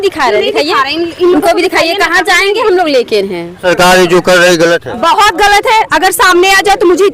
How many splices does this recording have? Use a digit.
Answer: 1